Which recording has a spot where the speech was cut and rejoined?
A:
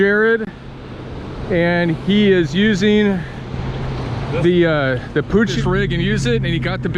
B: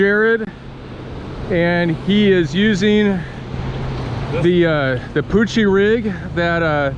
A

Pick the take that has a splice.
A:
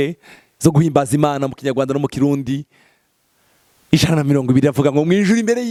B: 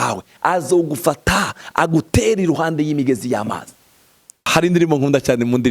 B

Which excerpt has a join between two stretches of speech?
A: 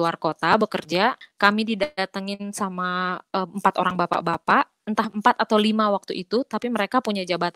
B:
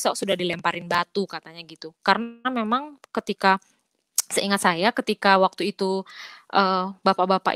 A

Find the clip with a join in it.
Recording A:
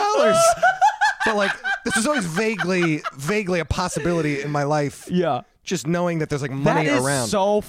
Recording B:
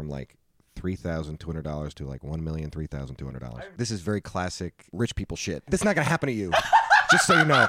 B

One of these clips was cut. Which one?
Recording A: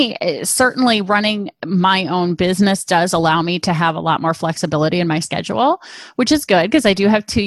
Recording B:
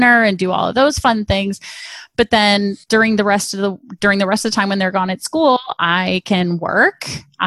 B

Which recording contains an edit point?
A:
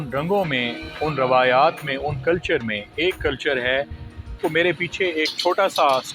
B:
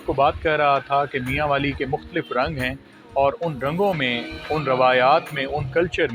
A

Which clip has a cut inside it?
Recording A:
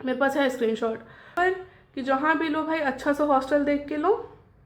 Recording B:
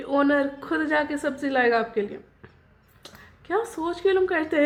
A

